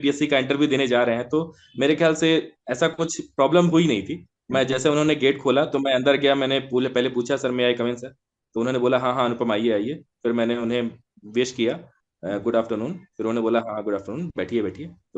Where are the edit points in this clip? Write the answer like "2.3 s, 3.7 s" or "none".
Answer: none